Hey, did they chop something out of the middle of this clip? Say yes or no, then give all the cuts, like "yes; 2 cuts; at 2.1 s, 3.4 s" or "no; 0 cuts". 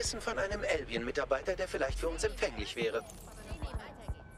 no; 0 cuts